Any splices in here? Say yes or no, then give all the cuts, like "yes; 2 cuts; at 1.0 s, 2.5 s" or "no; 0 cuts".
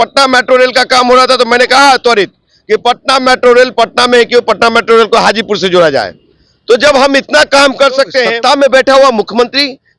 yes; 1 cut; at 8.3 s